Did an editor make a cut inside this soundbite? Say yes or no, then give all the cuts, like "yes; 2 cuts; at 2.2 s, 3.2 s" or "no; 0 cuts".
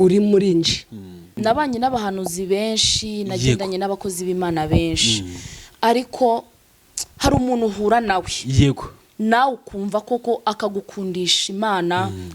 yes; 1 cut; at 1.2 s